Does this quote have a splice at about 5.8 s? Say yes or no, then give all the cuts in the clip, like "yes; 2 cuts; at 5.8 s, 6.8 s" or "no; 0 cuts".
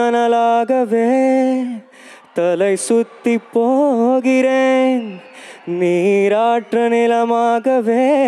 no; 0 cuts